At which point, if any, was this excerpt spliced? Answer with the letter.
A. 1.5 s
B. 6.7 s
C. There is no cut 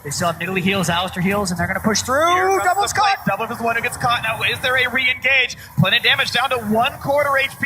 A